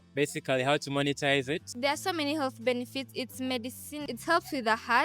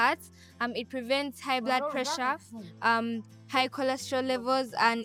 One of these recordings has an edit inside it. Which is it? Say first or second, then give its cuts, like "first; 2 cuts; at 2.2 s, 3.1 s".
first; 2 cuts; at 1.7 s, 4.0 s